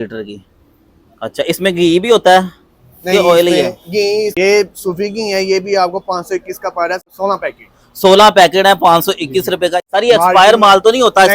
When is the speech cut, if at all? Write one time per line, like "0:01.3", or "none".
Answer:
0:04.3
0:07.1
0:09.8